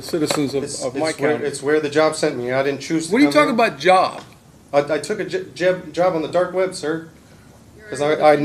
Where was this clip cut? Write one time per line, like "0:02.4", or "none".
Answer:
none

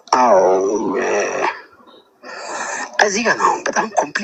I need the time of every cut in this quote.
none

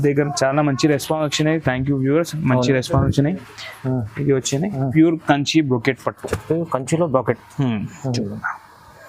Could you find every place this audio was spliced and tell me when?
0:04.8

